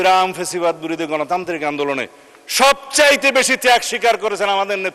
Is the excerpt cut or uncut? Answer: uncut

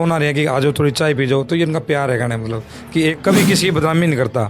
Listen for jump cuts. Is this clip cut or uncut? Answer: cut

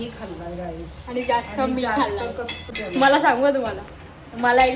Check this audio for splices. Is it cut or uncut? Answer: cut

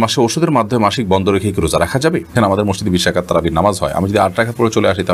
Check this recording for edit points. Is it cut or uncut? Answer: cut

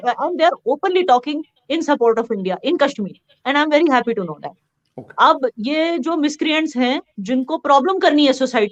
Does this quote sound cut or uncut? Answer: uncut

